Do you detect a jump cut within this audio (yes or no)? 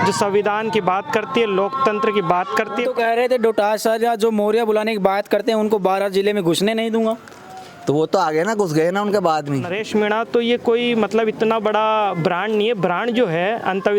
yes